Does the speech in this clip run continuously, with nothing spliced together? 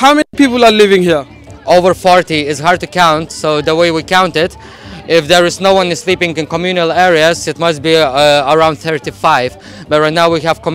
yes; 0 cuts

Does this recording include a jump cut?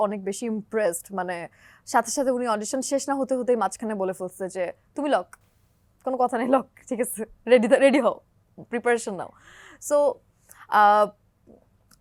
no; 0 cuts

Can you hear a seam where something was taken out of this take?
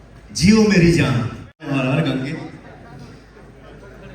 yes; 1 cut; at 1.6 s

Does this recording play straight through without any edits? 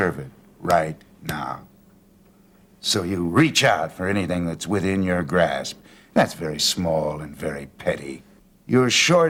yes; 0 cuts

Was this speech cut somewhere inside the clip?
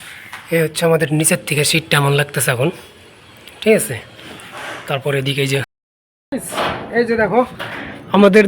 yes; 1 cut; at 5.8 s

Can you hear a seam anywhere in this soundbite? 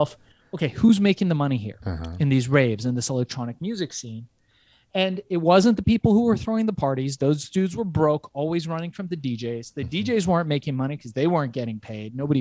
no; 0 cuts

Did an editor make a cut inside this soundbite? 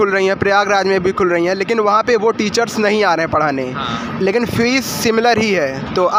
no; 0 cuts

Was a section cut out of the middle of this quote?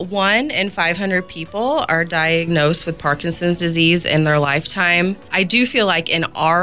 yes; 1 cut; at 5.2 s

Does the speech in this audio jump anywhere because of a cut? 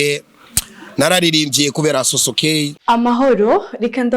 yes; 1 cut; at 2.7 s

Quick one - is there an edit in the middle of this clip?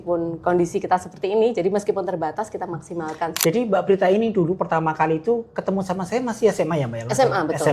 yes; 1 cut; at 3.3 s

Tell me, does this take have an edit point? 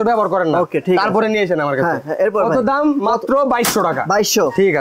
no; 0 cuts

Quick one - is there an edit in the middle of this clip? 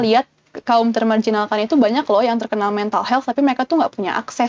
no; 0 cuts

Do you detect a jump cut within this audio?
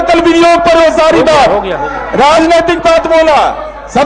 no; 0 cuts

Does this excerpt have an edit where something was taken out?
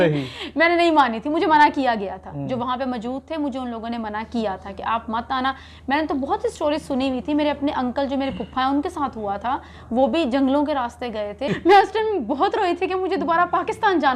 yes; 1 cut; at 11.5 s

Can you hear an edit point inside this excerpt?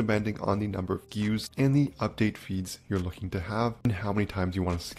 yes; 2 cuts; at 1.4 s, 3.9 s

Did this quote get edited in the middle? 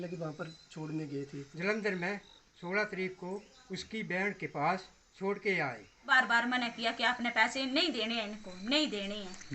yes; 2 cuts; at 1.4 s, 6.0 s

